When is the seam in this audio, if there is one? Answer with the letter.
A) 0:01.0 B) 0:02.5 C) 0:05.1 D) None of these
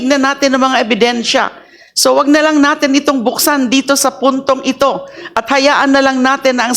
D